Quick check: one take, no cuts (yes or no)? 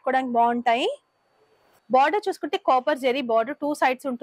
no